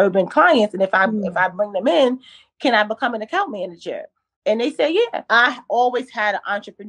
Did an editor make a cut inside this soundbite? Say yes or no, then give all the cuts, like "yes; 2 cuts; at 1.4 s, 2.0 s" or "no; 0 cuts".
yes; 1 cut; at 5.2 s